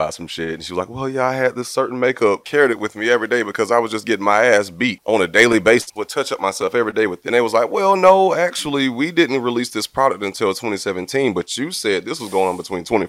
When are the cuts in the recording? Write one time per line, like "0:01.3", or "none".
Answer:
0:02.5
0:05.0
0:05.9
0:07.2